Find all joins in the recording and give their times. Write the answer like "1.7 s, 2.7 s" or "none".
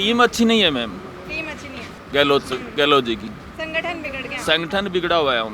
none